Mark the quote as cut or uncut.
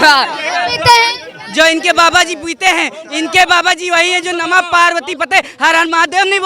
uncut